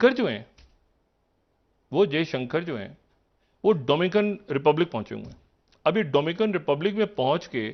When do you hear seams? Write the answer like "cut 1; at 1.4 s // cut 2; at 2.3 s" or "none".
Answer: none